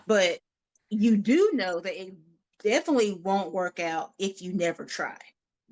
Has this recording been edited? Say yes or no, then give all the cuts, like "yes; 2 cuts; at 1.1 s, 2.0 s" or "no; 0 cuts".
no; 0 cuts